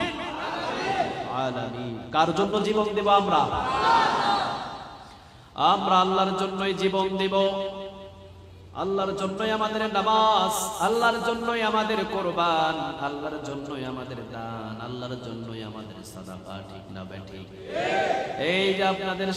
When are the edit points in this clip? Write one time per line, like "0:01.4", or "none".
none